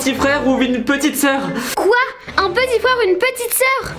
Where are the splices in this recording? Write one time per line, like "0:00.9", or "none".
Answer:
none